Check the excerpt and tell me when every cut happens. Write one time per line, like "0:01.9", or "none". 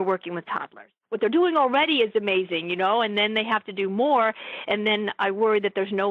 0:01.1